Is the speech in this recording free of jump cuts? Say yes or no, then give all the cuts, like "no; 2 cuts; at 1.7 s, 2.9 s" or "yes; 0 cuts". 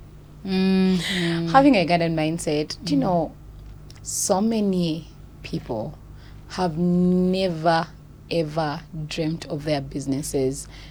yes; 0 cuts